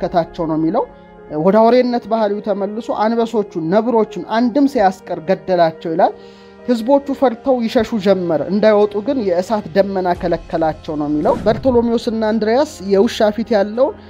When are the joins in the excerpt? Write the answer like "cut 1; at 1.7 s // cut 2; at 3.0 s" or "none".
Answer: cut 1; at 11.4 s